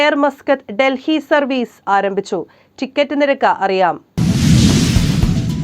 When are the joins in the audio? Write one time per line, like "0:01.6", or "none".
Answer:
0:04.1